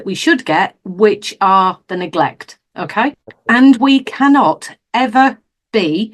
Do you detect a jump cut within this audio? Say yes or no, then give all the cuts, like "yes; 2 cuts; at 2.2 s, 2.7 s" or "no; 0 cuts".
yes; 1 cut; at 3.3 s